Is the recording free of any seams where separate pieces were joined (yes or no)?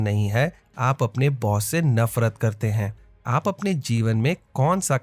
no